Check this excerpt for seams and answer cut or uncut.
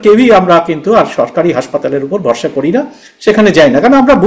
uncut